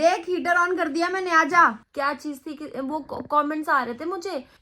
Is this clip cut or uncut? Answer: cut